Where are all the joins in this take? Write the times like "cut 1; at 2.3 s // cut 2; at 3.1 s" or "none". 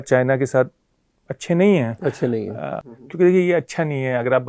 cut 1; at 2.8 s